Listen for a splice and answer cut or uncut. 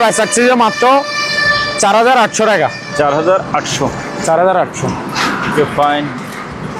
uncut